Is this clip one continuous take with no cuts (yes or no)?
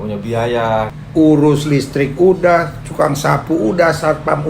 no